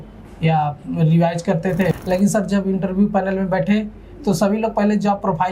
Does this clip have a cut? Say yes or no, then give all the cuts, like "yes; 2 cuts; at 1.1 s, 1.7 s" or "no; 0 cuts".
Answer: yes; 1 cut; at 2.0 s